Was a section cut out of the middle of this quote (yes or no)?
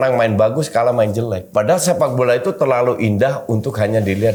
no